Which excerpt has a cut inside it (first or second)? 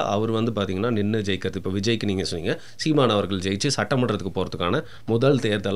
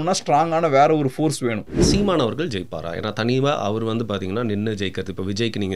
second